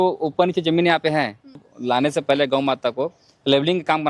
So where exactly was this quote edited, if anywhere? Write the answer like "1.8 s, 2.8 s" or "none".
1.7 s